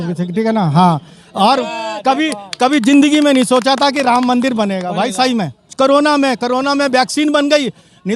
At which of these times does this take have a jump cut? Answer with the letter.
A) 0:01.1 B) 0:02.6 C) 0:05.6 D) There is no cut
C